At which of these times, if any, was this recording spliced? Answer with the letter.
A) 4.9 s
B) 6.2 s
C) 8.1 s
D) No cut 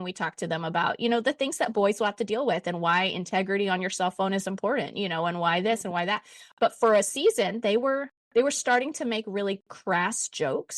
D